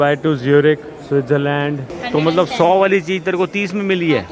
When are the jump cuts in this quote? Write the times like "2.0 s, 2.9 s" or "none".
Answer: 2.0 s